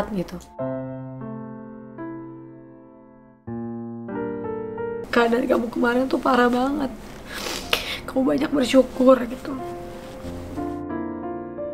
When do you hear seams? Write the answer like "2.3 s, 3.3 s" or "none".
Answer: 5.0 s